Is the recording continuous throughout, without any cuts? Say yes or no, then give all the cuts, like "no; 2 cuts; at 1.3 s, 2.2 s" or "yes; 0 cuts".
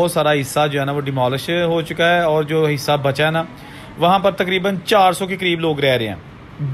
yes; 0 cuts